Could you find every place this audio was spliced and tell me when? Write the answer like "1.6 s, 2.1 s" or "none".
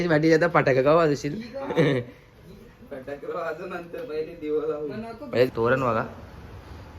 5.5 s